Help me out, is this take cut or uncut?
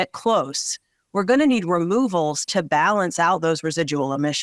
uncut